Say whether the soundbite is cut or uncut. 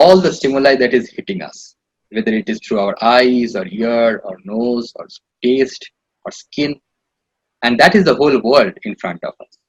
uncut